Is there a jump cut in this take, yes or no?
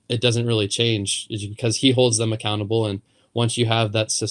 no